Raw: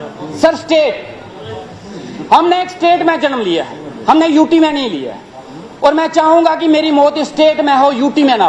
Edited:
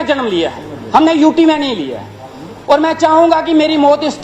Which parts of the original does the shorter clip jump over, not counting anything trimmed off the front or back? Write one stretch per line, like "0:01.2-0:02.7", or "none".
none